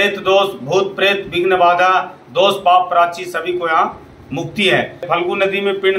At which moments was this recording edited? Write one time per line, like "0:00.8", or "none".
0:05.0